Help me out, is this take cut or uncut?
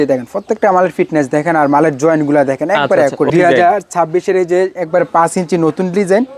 cut